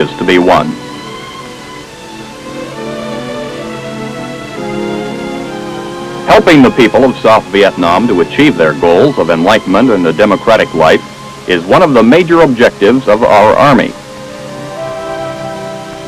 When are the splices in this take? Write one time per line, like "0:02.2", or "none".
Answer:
0:04.8